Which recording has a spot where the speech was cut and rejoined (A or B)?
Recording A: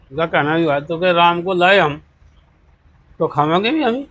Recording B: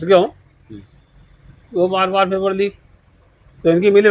B